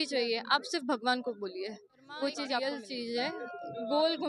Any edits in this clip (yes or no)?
yes